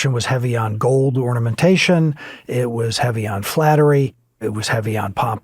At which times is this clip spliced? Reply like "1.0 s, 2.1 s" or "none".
4.2 s